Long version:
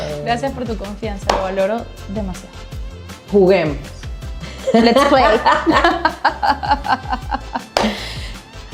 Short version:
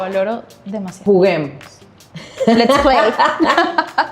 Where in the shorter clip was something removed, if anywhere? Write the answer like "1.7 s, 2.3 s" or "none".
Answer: 0.9 s

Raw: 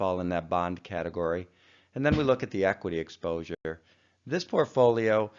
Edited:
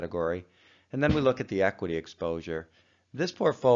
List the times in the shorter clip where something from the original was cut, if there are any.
2.5 s

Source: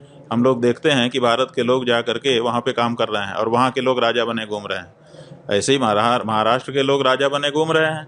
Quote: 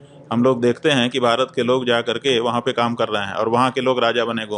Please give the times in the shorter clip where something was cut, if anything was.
none

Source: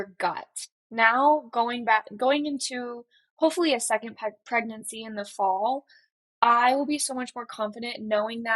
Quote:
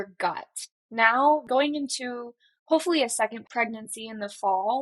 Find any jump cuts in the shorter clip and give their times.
1.4 s, 3.4 s

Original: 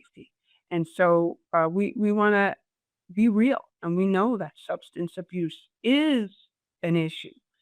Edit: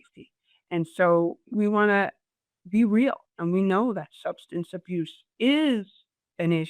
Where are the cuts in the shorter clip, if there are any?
1.5 s

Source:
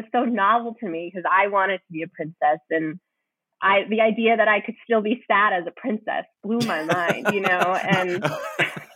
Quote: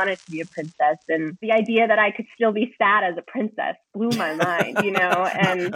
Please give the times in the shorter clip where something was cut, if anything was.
1.4 s

